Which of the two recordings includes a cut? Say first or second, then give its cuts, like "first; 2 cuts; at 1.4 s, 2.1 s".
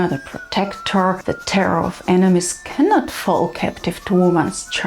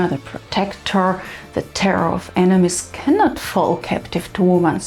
first; 1 cut; at 1.2 s